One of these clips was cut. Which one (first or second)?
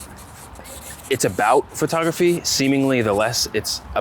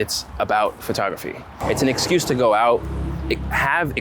second